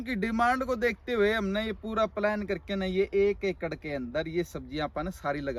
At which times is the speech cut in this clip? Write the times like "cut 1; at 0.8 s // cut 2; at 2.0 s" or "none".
none